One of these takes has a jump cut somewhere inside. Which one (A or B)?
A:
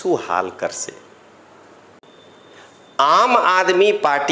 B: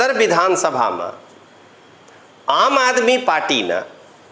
A